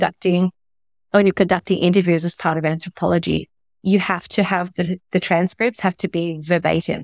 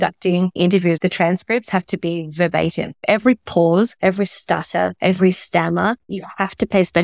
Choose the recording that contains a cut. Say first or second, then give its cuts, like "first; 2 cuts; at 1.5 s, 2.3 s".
second; 5 cuts; at 0.9 s, 2.9 s, 3.9 s, 4.9 s, 6.1 s